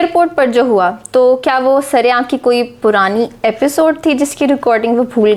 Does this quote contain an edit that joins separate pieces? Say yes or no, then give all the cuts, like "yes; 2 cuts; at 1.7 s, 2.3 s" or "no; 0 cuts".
no; 0 cuts